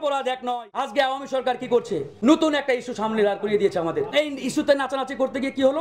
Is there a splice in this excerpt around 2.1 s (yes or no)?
yes